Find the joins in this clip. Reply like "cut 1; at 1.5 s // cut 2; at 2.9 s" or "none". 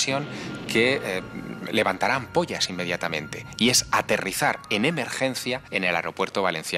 cut 1; at 5.7 s

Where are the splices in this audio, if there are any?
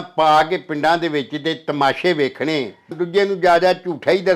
cut 1; at 2.9 s

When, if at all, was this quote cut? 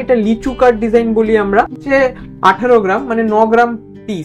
cut 1; at 1.8 s

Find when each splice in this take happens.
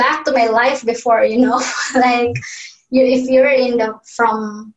none

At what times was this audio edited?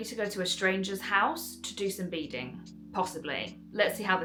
none

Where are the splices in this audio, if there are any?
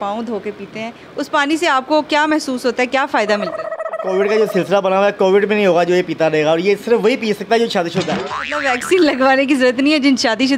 cut 1; at 4.0 s // cut 2; at 8.6 s

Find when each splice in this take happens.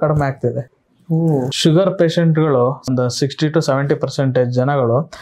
cut 1; at 1.2 s // cut 2; at 2.8 s

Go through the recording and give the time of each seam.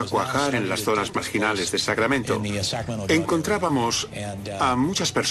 none

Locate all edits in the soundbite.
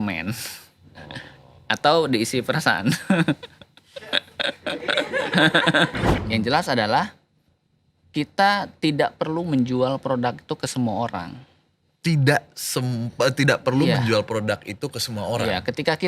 cut 1; at 6.1 s

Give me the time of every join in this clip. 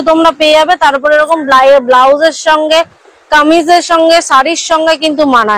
none

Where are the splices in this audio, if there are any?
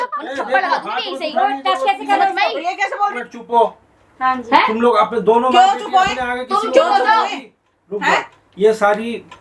cut 1; at 2.9 s

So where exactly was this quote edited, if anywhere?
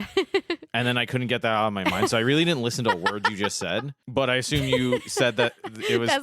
cut 1; at 4.0 s

